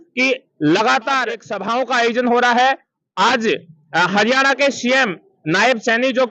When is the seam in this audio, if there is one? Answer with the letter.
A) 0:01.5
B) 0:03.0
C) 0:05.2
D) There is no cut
A